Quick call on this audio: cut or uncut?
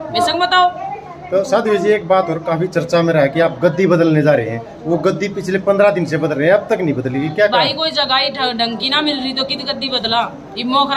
uncut